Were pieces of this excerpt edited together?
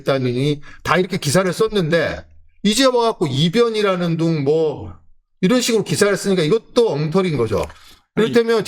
no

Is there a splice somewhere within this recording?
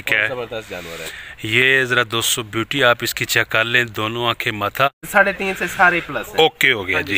yes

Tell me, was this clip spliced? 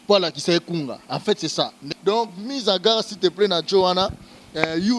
yes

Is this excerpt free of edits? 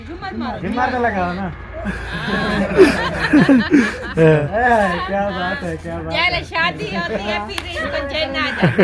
no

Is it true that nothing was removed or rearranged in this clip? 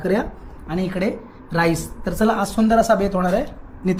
yes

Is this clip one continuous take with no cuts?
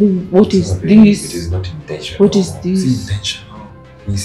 yes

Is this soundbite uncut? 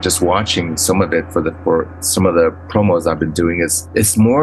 no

